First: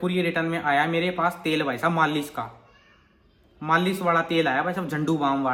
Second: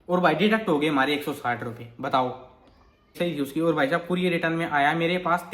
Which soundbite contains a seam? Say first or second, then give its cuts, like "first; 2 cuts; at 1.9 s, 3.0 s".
second; 1 cut; at 3.1 s